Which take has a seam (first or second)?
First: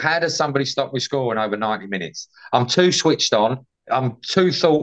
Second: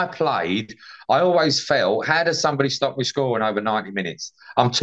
first